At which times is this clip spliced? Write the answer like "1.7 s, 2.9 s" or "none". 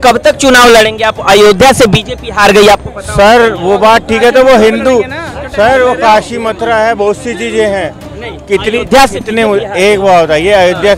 none